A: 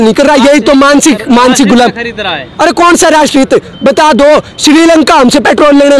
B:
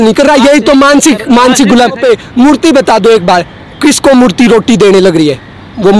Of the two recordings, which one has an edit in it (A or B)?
B